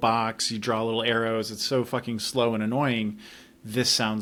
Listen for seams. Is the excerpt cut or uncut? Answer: uncut